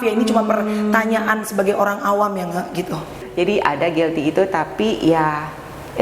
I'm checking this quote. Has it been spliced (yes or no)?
yes